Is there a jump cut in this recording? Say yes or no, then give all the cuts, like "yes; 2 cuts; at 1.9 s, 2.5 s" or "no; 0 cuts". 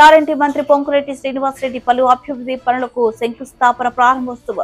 no; 0 cuts